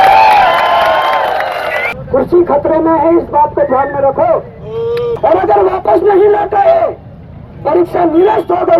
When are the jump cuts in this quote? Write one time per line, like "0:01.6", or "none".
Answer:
0:01.9
0:05.2